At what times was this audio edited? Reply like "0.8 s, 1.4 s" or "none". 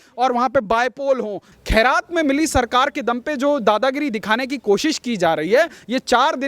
1.5 s